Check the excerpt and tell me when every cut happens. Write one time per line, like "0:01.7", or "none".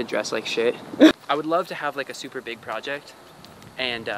0:01.2